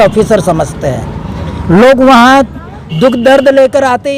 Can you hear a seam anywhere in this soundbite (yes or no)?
no